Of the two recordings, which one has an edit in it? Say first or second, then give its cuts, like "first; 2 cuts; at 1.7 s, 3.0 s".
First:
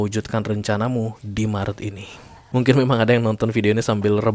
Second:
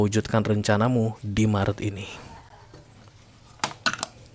first; 1 cut; at 2.4 s